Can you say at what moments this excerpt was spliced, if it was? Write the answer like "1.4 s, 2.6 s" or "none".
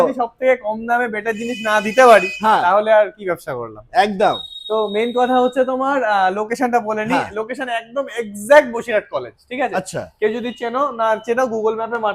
none